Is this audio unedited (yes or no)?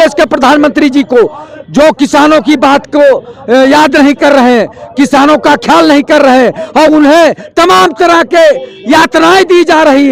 yes